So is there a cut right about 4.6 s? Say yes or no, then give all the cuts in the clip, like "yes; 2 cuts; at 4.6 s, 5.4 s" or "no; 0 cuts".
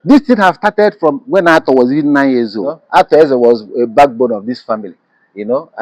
no; 1 cut; at 2.8 s